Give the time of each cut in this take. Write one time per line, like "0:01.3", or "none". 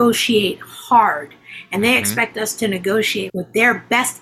0:03.3